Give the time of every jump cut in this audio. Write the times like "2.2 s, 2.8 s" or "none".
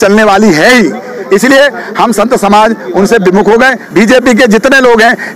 3.8 s